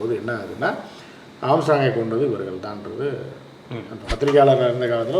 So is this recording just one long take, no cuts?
no; 1 cut; at 4.0 s

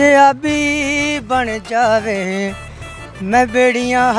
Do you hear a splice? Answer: no; 0 cuts

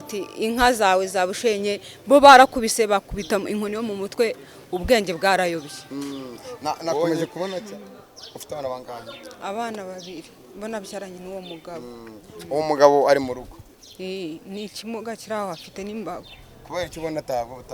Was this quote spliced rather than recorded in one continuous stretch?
yes; 1 cut; at 7.6 s

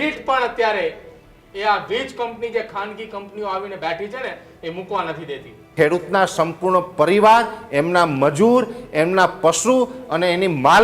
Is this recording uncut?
no; 1 cut; at 5.7 s

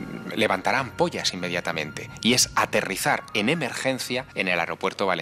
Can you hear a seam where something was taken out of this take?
yes; 1 cut; at 4.3 s

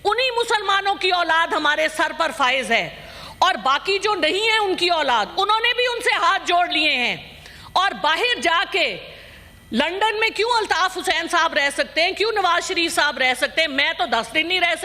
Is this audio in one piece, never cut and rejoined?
yes; 0 cuts

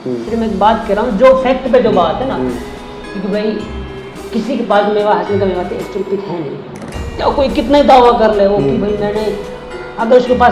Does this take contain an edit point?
no; 0 cuts

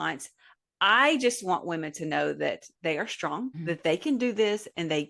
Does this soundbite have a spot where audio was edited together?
yes; 1 cut; at 3.6 s

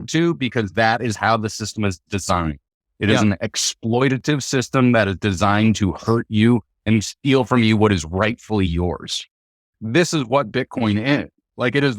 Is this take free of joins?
no; 1 cut; at 9.8 s

